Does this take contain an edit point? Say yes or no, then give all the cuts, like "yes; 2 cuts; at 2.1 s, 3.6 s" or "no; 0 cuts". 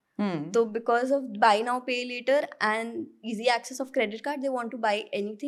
no; 0 cuts